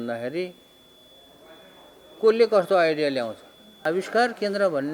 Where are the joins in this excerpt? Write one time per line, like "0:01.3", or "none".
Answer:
0:03.8